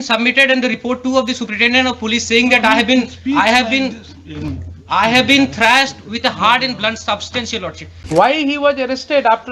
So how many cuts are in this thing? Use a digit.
1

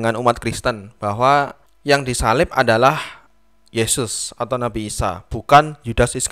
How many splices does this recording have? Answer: 0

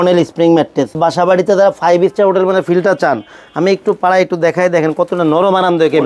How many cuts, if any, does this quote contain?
1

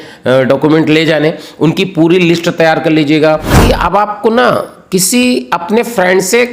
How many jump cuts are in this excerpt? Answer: 1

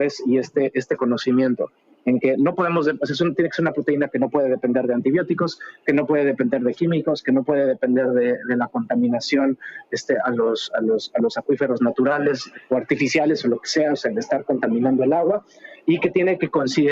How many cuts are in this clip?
2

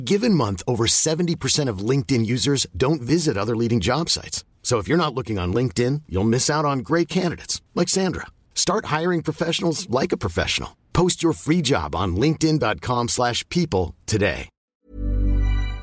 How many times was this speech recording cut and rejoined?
1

